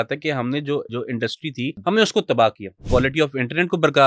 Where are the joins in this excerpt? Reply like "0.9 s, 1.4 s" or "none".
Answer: 1.3 s, 2.8 s